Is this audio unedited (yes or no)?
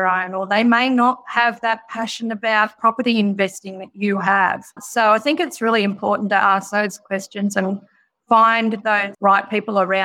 no